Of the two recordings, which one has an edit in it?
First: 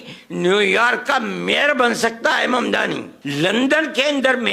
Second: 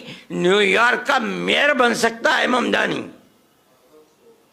first; 1 cut; at 3.1 s

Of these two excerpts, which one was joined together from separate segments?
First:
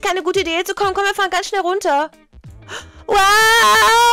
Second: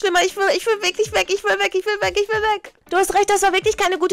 second; 1 cut; at 2.8 s

